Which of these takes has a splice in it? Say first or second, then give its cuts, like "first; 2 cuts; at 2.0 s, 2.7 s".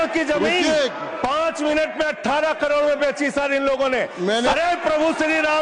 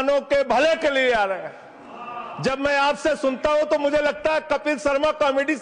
first; 1 cut; at 4.5 s